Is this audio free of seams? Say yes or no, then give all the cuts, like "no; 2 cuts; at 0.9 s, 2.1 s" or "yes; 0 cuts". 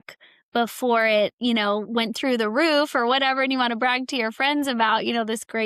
yes; 0 cuts